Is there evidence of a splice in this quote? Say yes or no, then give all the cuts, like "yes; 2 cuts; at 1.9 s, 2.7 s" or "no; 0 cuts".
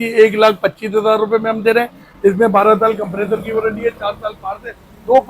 no; 0 cuts